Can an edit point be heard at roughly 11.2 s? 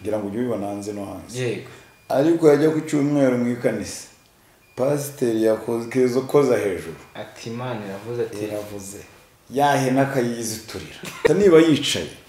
yes; 1 cut; at 11.2 s

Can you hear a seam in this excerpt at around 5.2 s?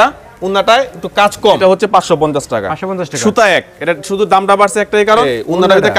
yes; 2 cuts; at 1.6 s, 5.2 s

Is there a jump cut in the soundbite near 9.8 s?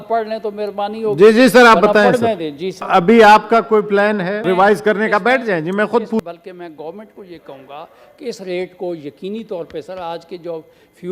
no; 3 cuts; at 2.9 s, 4.4 s, 6.2 s

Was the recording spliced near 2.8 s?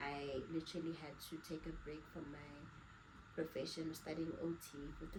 no; 0 cuts

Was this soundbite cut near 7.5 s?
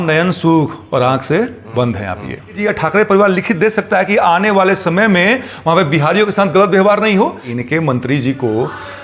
yes; 2 cuts; at 2.6 s, 7.5 s

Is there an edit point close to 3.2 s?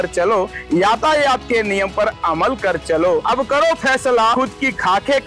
yes; 2 cuts; at 3.2 s, 4.3 s

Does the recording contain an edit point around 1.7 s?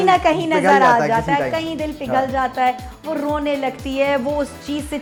no; 0 cuts

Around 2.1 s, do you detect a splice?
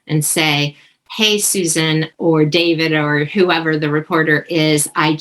yes; 1 cut; at 2.1 s

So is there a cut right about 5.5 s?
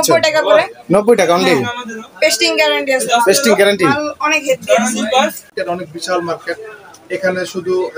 yes; 1 cut; at 5.5 s

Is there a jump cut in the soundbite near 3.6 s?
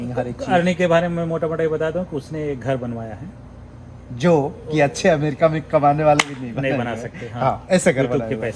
no; 0 cuts

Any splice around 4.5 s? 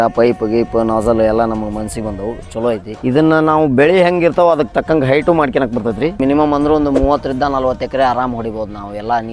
no; 2 cuts; at 2.9 s, 6.2 s

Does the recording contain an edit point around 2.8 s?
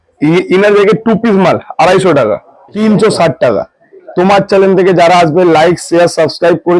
yes; 1 cut; at 2.8 s

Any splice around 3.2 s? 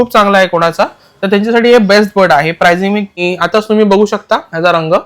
yes; 1 cut; at 3.2 s

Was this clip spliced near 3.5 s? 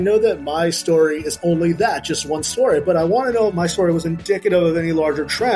yes; 1 cut; at 3.5 s

